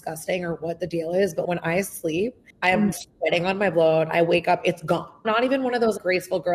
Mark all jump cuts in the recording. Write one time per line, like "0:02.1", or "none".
0:02.4